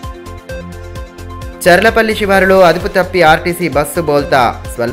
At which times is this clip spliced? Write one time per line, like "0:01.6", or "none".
0:01.0